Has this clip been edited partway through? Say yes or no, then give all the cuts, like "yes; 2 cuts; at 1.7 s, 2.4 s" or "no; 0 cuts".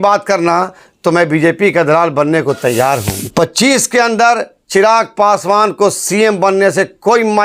yes; 1 cut; at 3.2 s